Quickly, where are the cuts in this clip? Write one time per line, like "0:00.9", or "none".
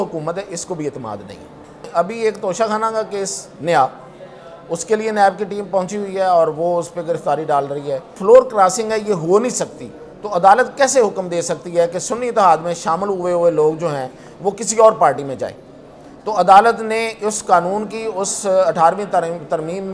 0:01.9
0:08.2